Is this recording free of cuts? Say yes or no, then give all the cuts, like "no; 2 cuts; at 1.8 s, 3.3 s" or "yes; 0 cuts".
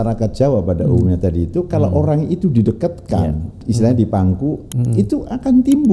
no; 1 cut; at 3.6 s